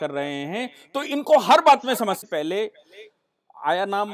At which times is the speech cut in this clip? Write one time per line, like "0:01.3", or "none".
0:02.2

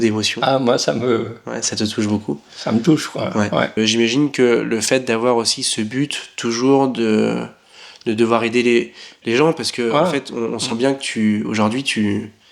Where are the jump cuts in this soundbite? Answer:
0:03.7

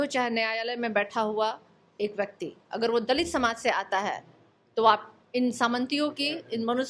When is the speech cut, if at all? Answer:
none

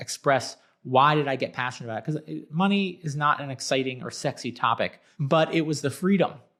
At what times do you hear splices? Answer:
none

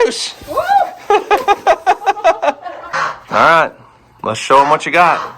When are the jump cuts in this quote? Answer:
0:02.8

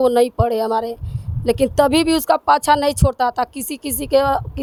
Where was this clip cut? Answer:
none

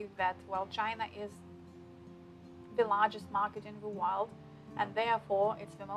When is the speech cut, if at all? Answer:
none

